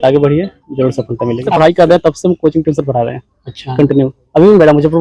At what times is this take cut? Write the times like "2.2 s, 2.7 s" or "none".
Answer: 1.5 s